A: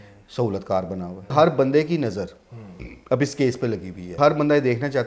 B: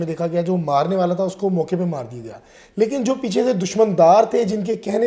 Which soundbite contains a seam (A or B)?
A